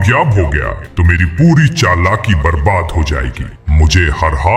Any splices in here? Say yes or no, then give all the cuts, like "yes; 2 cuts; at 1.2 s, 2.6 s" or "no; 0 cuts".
no; 0 cuts